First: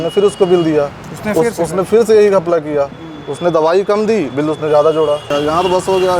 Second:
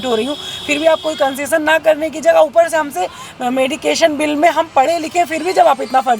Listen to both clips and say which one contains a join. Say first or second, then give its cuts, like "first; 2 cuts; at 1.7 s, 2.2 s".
first; 1 cut; at 5.3 s